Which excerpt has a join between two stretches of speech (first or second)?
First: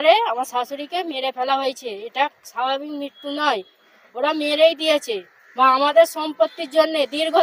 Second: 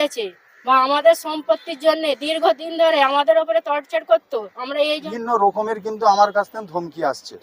second